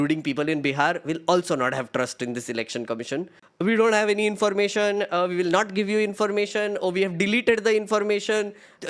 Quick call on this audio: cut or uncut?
cut